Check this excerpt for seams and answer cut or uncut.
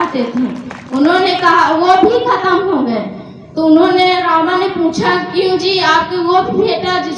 uncut